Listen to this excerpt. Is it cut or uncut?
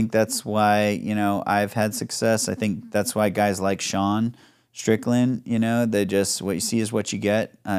uncut